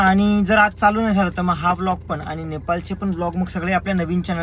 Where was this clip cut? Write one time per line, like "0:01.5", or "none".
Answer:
none